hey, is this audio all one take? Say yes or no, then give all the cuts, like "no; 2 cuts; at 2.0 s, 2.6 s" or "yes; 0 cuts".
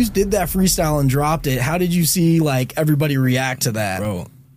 yes; 0 cuts